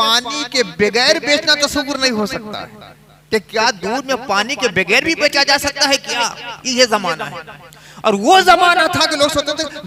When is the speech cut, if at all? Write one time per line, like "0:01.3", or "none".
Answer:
none